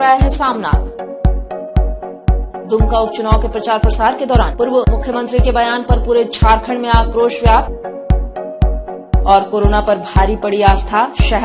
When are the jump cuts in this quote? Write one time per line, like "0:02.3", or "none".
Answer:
0:07.7
0:09.2